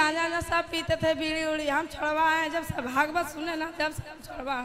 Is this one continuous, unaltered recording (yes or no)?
yes